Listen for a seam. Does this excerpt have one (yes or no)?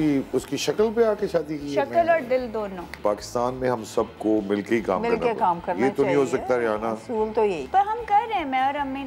yes